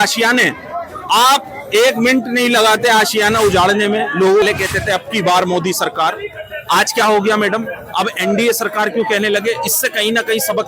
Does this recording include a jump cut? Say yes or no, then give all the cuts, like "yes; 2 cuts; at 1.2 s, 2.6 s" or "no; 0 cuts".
yes; 1 cut; at 4.4 s